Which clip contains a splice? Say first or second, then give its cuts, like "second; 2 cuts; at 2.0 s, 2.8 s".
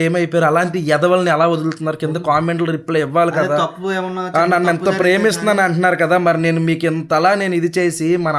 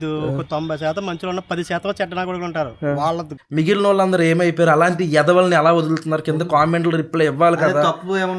second; 1 cut; at 3.3 s